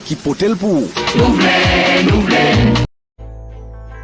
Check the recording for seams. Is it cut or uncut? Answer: cut